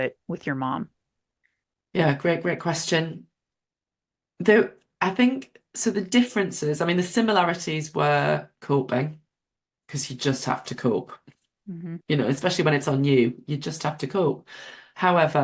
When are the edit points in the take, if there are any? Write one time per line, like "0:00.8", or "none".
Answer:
none